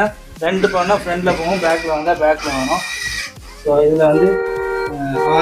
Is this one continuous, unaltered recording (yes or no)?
yes